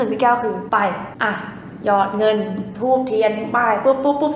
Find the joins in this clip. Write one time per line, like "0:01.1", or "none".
none

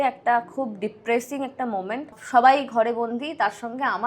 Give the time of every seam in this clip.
0:02.2

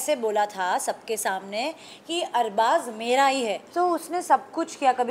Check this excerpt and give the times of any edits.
0:03.6

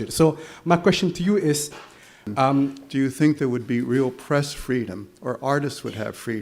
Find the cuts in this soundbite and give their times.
0:02.8

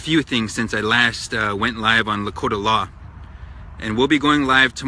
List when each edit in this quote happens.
0:02.5

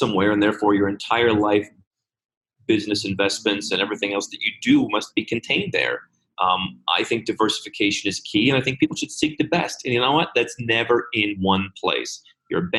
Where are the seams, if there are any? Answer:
none

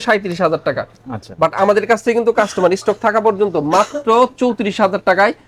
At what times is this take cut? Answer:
none

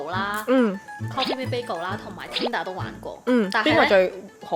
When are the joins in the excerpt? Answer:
none

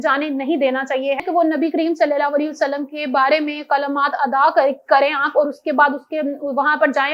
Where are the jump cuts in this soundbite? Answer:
0:01.2

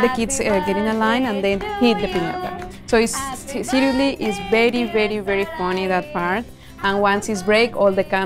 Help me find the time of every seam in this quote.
none

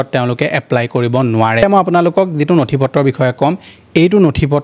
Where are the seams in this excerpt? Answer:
0:01.6

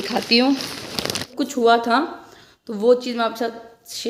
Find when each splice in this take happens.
0:01.3

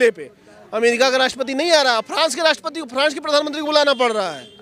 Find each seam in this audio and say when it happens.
none

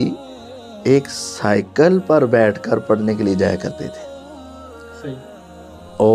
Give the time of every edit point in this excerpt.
none

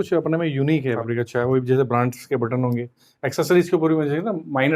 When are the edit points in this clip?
0:01.0

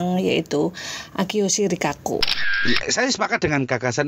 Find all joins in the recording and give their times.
0:02.6

